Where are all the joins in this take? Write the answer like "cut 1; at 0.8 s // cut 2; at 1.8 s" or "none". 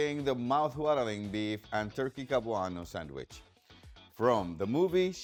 none